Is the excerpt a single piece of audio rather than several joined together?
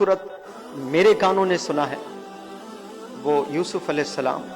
yes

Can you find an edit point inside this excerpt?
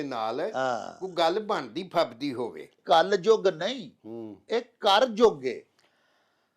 yes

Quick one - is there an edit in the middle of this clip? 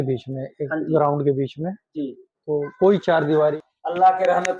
yes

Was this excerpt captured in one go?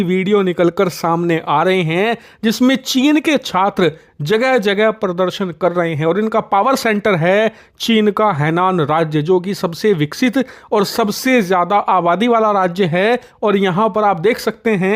yes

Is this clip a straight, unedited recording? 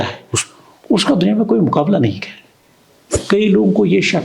no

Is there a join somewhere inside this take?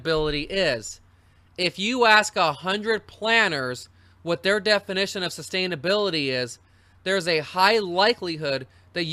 yes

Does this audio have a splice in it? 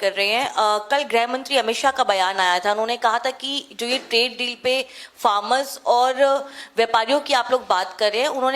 no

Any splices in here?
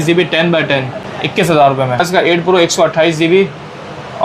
yes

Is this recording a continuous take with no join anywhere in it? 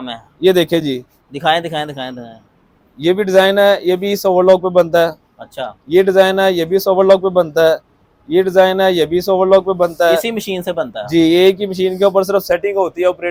yes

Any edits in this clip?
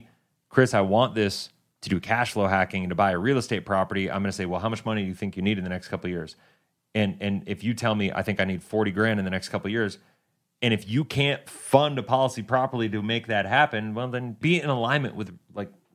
yes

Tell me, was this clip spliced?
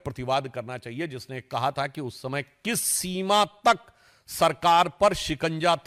no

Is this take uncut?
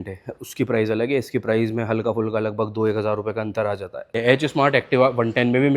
no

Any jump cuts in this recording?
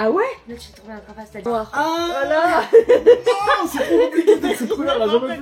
yes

